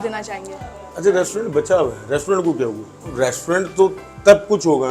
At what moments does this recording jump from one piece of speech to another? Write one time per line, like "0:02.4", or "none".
0:03.0